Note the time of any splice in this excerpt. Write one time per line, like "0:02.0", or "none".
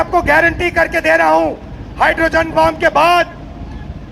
none